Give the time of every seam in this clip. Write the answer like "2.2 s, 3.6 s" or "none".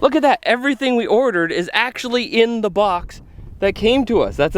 none